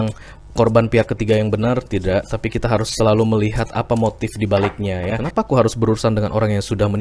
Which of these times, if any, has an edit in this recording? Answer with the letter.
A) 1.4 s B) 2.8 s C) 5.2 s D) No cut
C